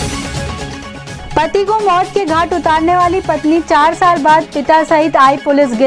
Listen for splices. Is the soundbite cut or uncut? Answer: cut